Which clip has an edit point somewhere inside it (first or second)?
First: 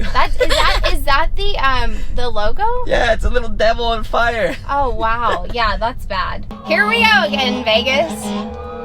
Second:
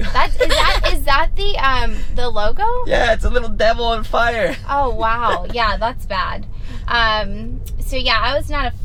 first